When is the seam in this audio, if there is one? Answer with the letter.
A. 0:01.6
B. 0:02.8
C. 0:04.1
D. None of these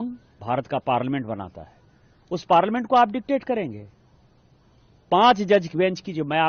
D